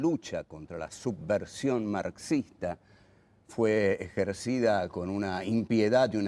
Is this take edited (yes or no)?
yes